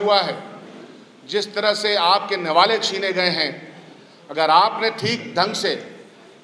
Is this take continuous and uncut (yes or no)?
yes